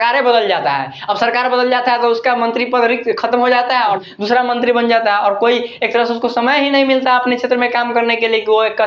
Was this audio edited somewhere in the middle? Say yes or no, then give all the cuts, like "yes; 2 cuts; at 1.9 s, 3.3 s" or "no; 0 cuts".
no; 0 cuts